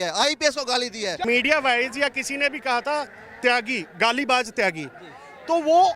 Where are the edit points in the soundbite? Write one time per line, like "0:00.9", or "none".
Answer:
0:01.2